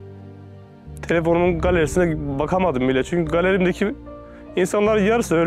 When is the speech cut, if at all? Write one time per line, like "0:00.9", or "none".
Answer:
0:01.0